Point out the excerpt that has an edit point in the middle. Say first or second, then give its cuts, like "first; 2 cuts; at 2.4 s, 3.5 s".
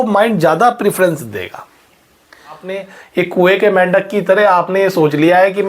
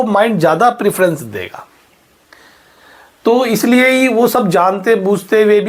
first; 1 cut; at 2.8 s